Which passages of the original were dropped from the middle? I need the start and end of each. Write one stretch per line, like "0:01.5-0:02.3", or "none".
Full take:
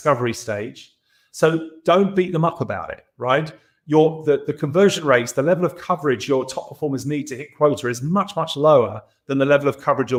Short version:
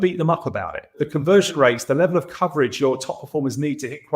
0:03.1-0:04.5